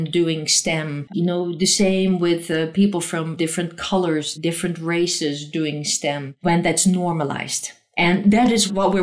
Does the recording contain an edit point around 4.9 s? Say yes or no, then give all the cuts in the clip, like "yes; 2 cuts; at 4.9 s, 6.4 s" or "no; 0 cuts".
no; 2 cuts; at 1.0 s, 6.3 s